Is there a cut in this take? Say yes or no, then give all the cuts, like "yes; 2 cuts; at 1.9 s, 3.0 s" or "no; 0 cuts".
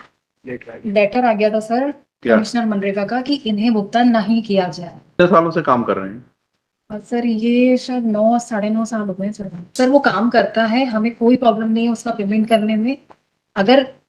yes; 2 cuts; at 5.1 s, 9.6 s